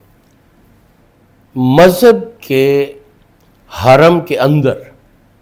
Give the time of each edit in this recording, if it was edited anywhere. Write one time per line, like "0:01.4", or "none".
none